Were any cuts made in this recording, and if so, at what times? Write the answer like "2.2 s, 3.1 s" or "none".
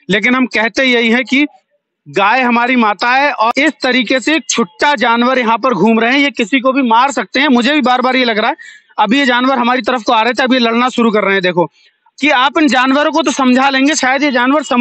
3.5 s, 12.0 s